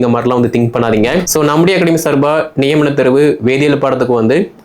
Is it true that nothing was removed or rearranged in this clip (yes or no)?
no